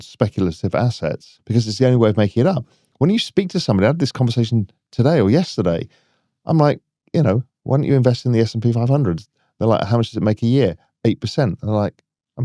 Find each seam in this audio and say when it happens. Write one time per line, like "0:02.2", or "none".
0:01.3